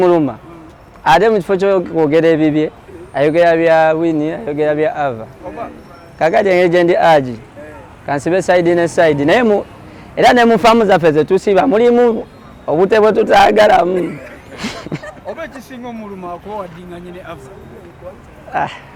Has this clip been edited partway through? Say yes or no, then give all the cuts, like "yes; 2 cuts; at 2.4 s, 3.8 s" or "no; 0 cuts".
no; 0 cuts